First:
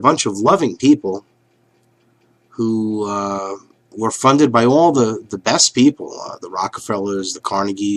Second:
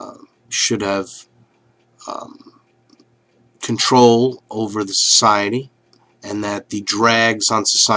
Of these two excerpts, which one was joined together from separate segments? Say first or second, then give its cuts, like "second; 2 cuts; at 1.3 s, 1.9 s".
second; 1 cut; at 6.5 s